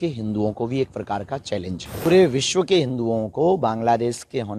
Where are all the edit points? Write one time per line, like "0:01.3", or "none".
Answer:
0:02.1